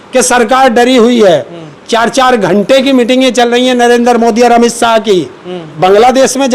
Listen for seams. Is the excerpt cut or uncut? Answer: cut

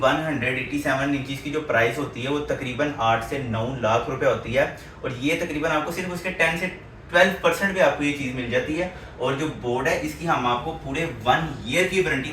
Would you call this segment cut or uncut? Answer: uncut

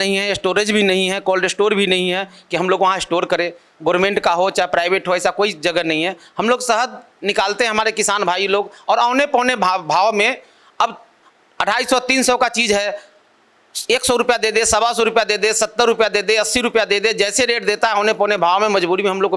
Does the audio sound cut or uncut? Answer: uncut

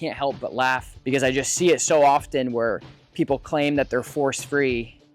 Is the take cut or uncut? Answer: cut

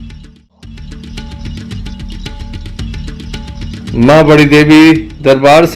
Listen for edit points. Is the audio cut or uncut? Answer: cut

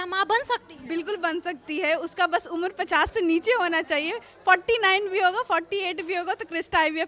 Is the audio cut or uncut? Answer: uncut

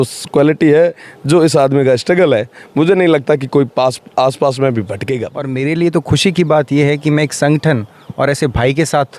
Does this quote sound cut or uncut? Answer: cut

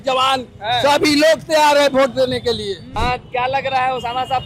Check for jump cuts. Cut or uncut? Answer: cut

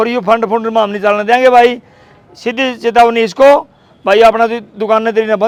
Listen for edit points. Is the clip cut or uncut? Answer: uncut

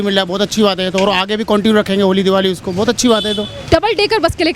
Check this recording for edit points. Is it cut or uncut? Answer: cut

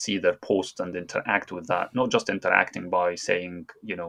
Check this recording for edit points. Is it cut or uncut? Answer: uncut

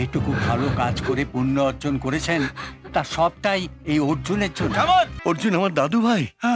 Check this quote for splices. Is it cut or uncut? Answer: cut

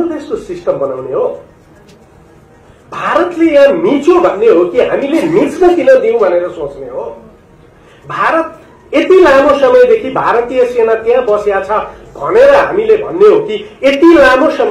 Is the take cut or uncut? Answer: uncut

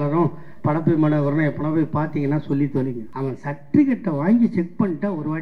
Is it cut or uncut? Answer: cut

